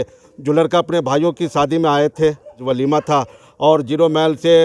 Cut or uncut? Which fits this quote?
cut